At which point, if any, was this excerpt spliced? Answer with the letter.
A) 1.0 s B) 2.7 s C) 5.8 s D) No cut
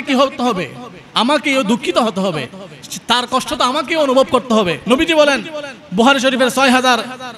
D